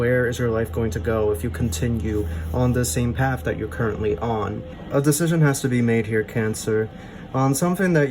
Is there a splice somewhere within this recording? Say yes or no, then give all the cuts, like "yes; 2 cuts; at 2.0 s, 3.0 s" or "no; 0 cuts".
yes; 1 cut; at 4.7 s